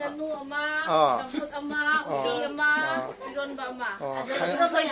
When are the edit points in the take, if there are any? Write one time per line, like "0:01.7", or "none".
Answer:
none